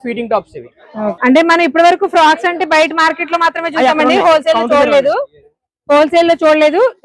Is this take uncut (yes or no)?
no